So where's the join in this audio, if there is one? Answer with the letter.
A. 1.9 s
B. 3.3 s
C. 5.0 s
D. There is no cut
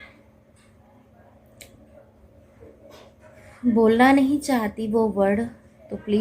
D